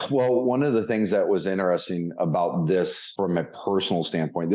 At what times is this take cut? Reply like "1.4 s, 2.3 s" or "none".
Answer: 3.0 s